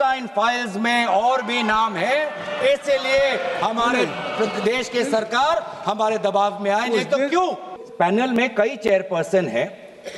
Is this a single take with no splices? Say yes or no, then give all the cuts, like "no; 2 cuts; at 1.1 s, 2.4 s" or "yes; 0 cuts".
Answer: no; 1 cut; at 7.7 s